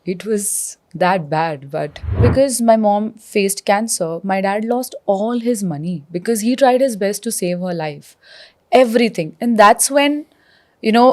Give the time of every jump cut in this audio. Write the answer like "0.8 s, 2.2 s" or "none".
2.2 s